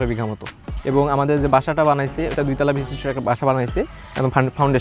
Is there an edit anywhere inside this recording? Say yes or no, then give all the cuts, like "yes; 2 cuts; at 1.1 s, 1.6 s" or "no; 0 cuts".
no; 0 cuts